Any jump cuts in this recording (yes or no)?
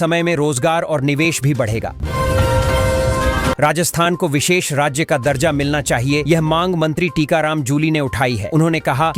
yes